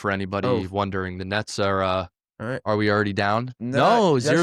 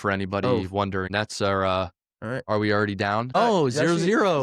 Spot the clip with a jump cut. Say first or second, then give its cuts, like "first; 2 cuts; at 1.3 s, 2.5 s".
second; 2 cuts; at 1.1 s, 3.3 s